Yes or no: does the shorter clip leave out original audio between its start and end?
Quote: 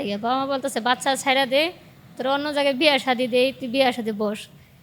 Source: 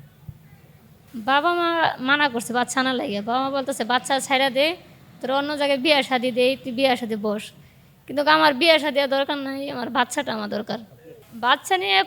no